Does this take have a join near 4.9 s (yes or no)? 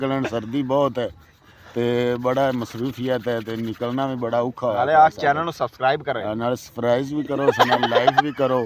no